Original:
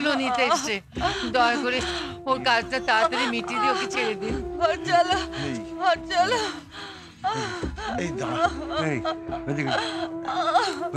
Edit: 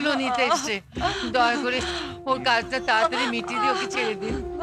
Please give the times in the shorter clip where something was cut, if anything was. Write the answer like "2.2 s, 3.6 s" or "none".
none